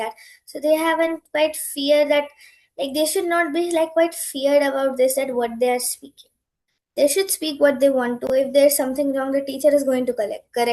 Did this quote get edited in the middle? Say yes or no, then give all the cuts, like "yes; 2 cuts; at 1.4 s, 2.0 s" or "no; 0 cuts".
no; 0 cuts